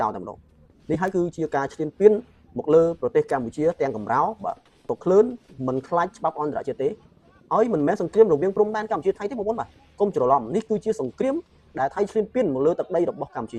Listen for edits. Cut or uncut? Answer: uncut